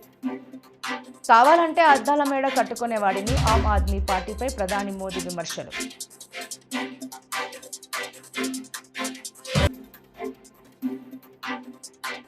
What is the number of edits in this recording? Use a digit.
1